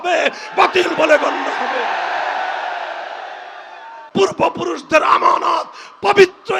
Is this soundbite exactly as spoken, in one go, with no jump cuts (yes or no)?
no